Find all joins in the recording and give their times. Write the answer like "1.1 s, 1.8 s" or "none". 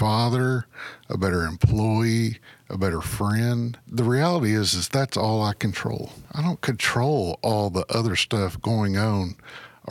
3.8 s, 6.3 s